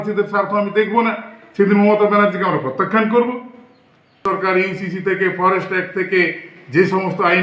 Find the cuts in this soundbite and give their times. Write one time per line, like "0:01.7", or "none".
0:04.2